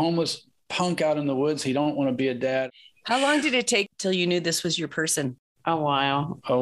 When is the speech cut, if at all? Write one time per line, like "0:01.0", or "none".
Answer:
0:02.7
0:03.9